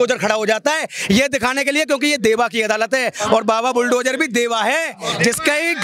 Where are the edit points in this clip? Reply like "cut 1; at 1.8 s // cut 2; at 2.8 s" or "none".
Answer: none